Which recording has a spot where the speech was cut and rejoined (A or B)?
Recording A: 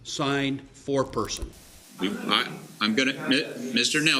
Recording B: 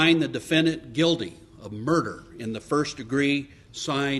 A